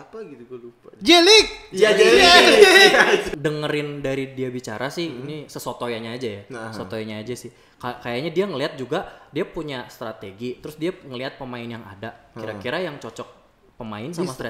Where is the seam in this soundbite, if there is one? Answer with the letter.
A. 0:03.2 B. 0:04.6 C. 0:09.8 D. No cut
A